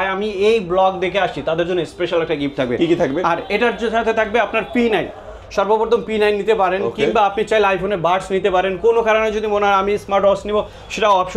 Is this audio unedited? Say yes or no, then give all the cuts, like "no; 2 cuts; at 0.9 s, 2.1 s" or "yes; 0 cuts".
yes; 0 cuts